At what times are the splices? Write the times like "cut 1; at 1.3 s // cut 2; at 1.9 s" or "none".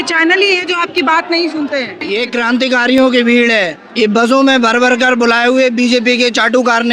cut 1; at 2.1 s

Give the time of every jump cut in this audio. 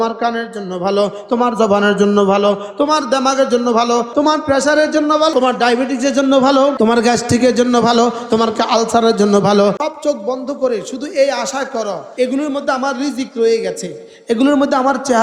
cut 1; at 4.1 s // cut 2; at 5.3 s // cut 3; at 6.8 s // cut 4; at 9.8 s // cut 5; at 12.0 s

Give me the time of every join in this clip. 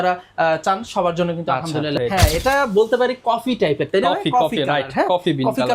cut 1; at 2.0 s

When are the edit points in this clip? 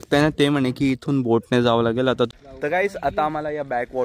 cut 1; at 2.4 s

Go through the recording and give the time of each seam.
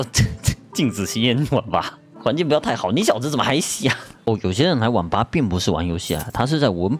cut 1; at 2.0 s // cut 2; at 4.1 s

